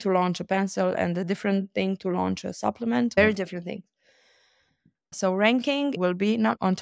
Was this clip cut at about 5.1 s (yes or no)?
yes